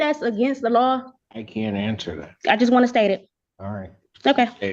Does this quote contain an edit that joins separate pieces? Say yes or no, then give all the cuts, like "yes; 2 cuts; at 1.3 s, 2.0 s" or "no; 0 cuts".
yes; 1 cut; at 1.2 s